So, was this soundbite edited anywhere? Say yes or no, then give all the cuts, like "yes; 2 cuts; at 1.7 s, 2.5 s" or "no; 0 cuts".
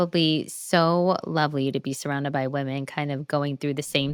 no; 0 cuts